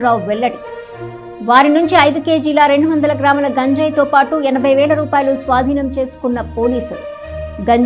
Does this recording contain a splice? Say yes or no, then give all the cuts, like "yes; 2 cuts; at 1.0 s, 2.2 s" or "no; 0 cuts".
no; 0 cuts